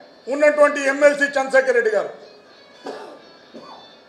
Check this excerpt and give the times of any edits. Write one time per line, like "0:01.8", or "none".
none